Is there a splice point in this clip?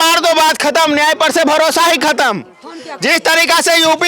no; 0 cuts

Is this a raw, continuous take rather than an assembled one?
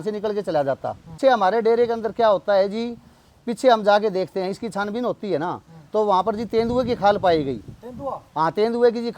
no; 1 cut; at 1.1 s

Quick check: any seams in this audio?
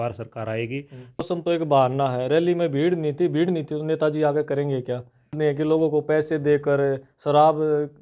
yes; 2 cuts; at 1.3 s, 5.3 s

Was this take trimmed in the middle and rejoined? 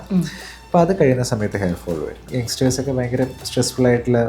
yes; 1 cut; at 2.1 s

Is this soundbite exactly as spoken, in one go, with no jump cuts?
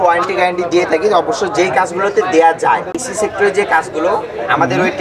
no; 1 cut; at 2.9 s

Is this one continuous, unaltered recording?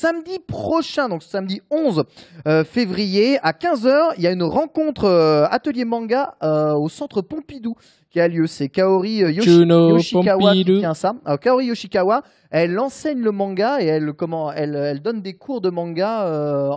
no; 1 cut; at 6.6 s

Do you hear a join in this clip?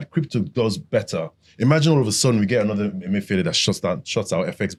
no; 0 cuts

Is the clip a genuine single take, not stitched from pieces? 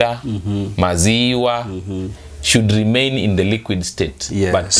yes; 0 cuts

